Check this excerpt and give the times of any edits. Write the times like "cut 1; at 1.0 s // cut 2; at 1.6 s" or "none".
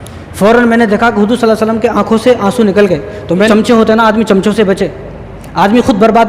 cut 1; at 3.5 s